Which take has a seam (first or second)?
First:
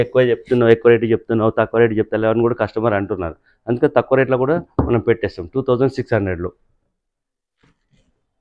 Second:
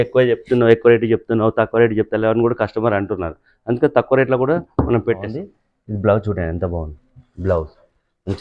second